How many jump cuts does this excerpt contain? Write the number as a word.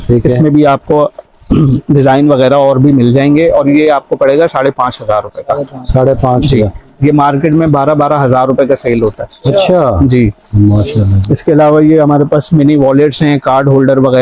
zero